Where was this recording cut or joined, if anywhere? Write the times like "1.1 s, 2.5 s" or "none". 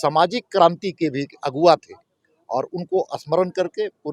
none